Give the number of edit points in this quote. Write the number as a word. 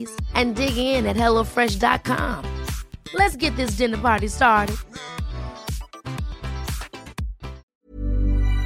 one